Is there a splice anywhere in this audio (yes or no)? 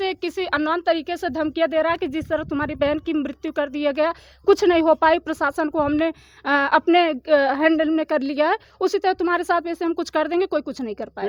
no